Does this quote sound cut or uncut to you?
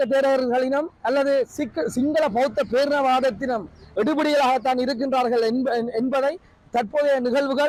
uncut